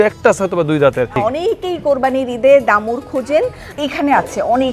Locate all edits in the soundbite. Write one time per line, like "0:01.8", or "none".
0:01.1
0:03.6